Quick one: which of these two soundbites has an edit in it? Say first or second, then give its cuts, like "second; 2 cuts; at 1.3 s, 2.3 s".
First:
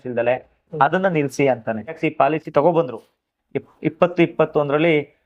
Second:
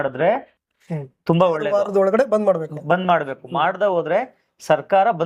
first; 1 cut; at 2.0 s